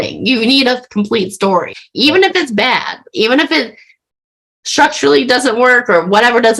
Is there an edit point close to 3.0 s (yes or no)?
no